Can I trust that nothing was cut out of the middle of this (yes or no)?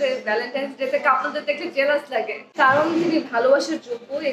no